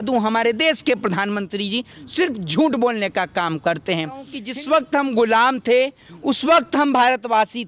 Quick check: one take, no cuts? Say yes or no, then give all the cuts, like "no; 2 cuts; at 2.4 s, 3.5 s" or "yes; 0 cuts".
no; 1 cut; at 4.4 s